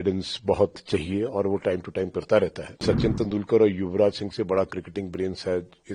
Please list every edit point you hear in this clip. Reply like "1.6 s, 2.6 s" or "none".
2.8 s

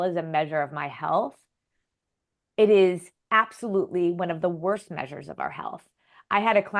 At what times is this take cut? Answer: none

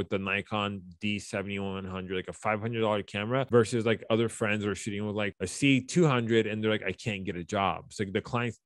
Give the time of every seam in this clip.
5.3 s

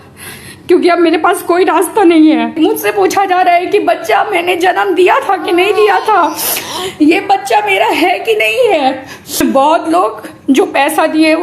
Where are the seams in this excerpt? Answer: 2.5 s, 9.4 s

